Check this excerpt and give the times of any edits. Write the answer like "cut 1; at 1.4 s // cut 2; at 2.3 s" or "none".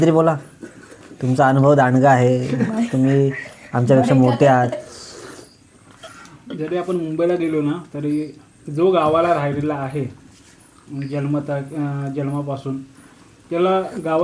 none